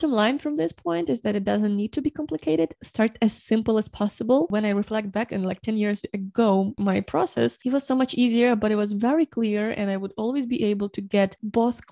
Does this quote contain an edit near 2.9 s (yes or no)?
no